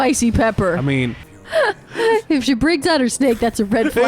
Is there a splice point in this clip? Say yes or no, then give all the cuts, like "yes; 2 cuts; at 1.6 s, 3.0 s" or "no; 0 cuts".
yes; 1 cut; at 1.3 s